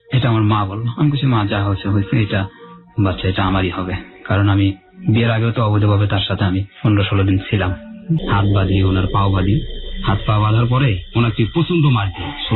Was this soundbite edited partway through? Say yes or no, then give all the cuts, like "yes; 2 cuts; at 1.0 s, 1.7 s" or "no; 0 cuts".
yes; 1 cut; at 8.2 s